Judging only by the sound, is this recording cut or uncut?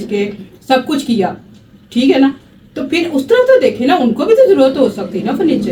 uncut